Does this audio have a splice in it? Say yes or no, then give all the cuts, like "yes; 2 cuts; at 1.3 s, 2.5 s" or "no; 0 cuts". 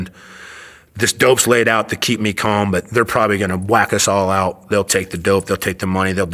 no; 0 cuts